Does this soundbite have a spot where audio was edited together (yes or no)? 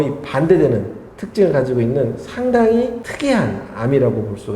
yes